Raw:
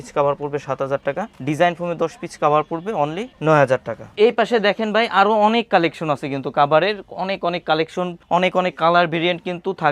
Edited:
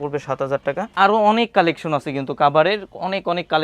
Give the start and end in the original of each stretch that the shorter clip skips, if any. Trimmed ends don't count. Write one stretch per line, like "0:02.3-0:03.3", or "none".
0:01.3-0:05.1